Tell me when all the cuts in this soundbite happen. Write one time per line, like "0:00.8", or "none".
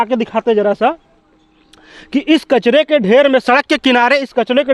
none

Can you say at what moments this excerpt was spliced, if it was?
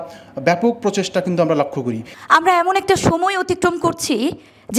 0:02.1

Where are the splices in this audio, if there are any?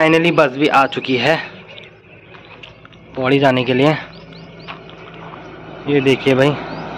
none

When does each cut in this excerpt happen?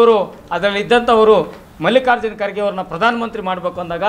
none

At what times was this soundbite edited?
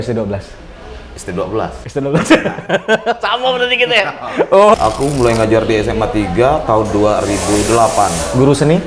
0:04.8

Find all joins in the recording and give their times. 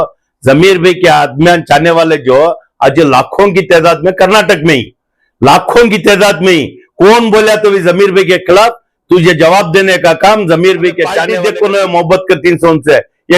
0:11.3

